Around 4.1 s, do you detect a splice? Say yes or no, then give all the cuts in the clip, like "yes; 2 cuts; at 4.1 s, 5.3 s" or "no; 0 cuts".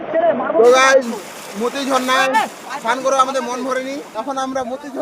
yes; 1 cut; at 4.1 s